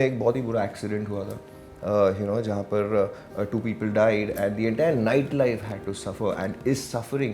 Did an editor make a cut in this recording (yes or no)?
no